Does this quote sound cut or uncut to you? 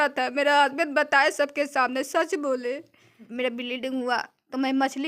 cut